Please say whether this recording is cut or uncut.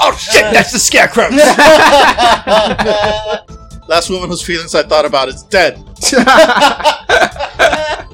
cut